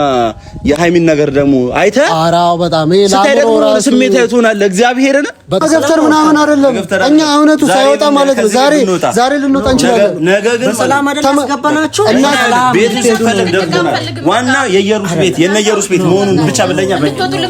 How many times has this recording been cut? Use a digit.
1